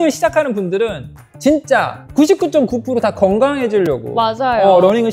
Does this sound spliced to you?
no; 0 cuts

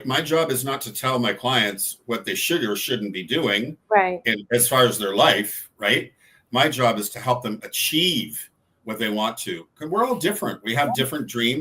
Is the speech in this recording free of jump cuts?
yes; 0 cuts

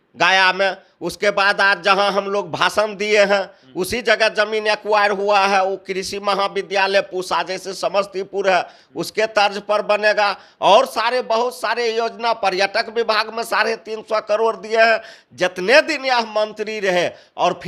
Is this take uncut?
yes; 0 cuts

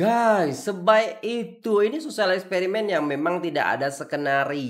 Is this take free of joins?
yes; 0 cuts

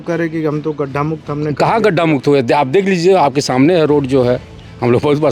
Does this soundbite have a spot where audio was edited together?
no; 0 cuts

